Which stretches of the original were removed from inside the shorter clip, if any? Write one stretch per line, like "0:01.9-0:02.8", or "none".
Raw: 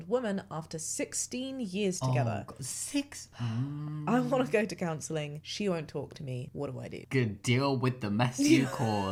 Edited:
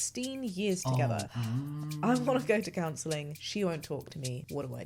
0:02.5-0:03.4